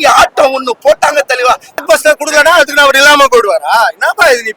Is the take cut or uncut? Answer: cut